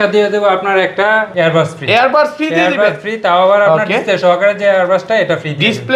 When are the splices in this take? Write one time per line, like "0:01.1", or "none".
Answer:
0:01.3